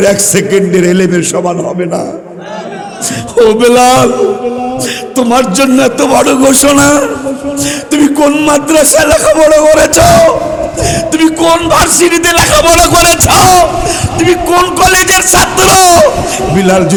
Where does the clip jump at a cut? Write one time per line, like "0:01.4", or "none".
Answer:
none